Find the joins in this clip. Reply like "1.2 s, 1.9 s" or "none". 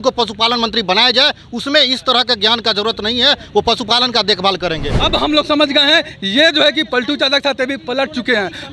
4.9 s